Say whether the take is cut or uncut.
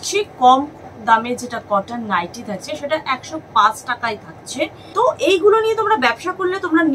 cut